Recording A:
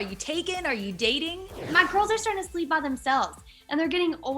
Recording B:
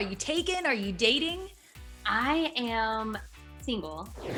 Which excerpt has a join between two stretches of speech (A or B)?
A